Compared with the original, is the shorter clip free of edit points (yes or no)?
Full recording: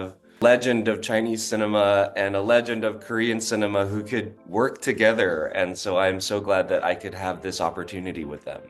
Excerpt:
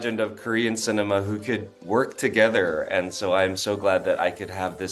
yes